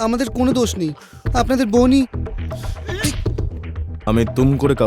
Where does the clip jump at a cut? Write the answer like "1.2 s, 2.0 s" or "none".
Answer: 3.8 s